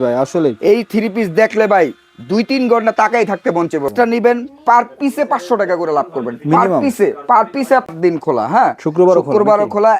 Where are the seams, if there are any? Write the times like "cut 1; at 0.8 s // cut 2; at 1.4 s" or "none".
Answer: cut 1; at 3.9 s // cut 2; at 7.9 s